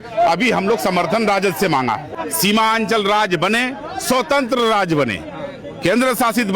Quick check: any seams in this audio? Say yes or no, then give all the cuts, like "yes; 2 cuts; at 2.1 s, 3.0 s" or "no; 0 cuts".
yes; 1 cut; at 2.1 s